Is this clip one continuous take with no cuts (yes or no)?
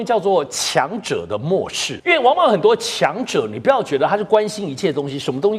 no